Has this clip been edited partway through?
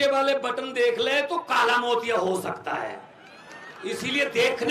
no; 0 cuts

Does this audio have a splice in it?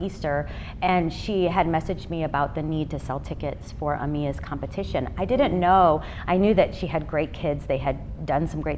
no; 0 cuts

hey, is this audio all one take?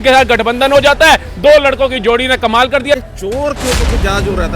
no; 1 cut; at 2.9 s

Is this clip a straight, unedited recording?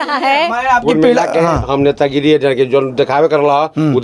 yes; 0 cuts

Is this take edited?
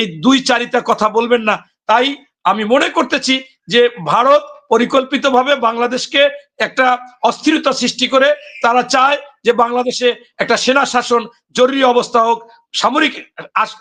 no; 0 cuts

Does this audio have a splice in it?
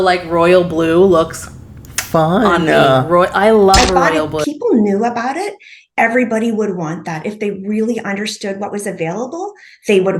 yes; 1 cut; at 4.4 s

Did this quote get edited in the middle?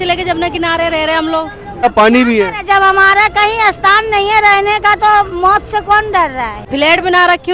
yes; 2 cuts; at 1.8 s, 6.6 s

